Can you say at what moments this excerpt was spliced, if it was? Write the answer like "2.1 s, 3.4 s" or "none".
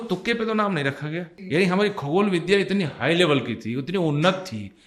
1.3 s